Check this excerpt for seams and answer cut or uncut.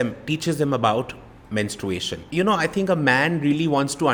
uncut